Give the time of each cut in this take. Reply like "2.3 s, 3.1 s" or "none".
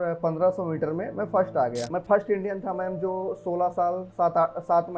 1.9 s